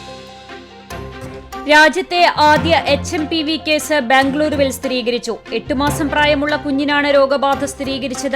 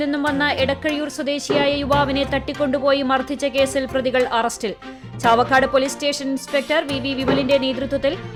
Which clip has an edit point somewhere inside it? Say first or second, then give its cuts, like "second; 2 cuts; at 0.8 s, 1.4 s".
first; 1 cut; at 1.4 s